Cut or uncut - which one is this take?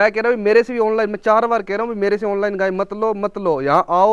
uncut